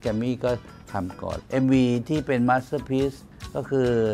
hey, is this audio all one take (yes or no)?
no